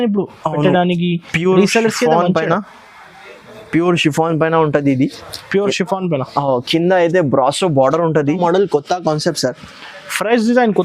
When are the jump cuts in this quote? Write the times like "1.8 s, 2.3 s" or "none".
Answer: 8.4 s